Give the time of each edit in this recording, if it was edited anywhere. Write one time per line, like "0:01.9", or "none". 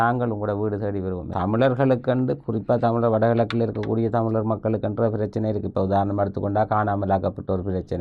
0:01.3